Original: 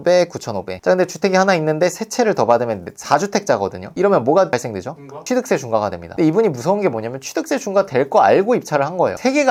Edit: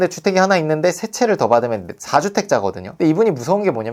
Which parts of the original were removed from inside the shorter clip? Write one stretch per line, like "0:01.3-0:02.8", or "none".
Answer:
0:03.8-0:06.0

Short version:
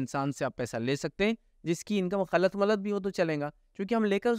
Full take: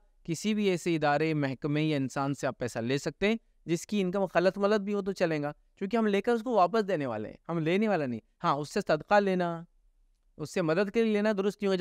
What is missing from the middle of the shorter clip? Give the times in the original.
none

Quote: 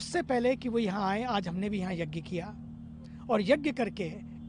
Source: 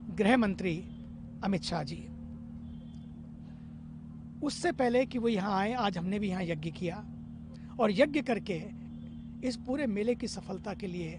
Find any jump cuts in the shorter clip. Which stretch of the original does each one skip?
none

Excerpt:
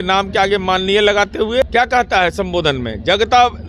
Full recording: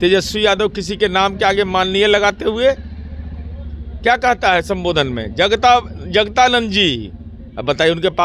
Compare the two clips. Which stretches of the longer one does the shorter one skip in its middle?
0:02.7-0:03.9

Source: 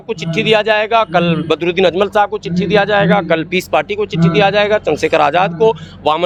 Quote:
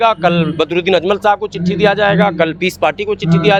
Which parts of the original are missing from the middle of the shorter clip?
none

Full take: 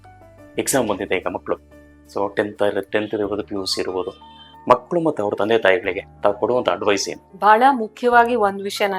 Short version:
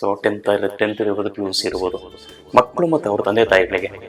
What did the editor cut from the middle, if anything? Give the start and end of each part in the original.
none

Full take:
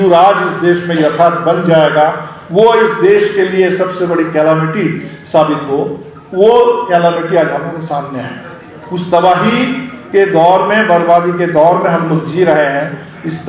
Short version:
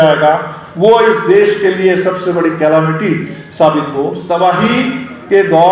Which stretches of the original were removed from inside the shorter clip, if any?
0:05.9-0:09.0

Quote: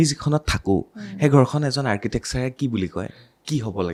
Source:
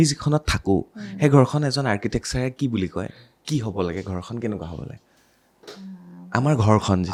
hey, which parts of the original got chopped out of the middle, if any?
none

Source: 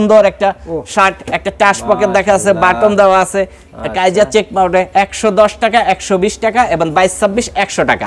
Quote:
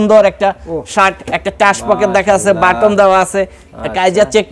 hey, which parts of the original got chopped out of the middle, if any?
none

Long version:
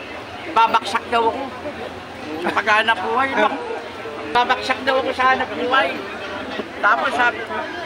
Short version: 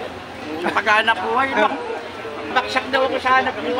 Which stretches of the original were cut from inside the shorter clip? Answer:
0:04.3-0:04.5

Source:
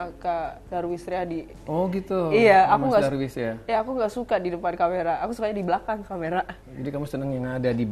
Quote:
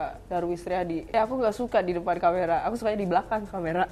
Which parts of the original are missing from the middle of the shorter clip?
0:01.4-0:03.6

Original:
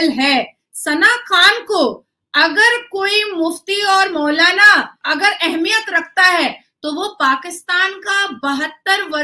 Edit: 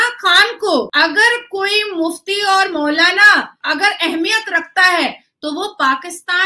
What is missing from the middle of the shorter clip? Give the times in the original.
0:02.0-0:02.3

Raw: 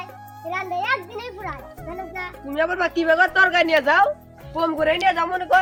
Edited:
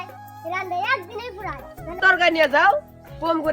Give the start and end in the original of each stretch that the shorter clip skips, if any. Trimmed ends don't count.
0:02.0-0:03.3

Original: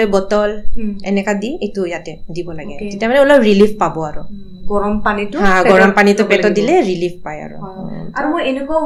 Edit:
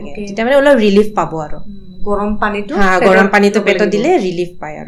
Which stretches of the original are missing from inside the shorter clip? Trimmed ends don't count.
none

